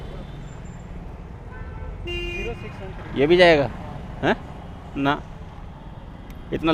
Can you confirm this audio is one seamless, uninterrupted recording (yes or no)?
yes